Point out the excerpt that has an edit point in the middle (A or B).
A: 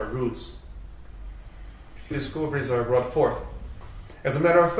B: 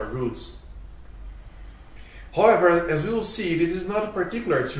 B